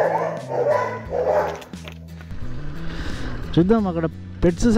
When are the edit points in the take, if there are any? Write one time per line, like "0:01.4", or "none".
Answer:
0:02.1